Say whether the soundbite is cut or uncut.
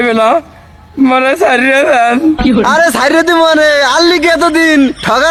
uncut